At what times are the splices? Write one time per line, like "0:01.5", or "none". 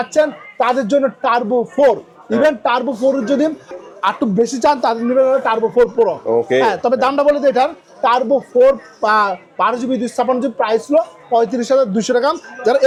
none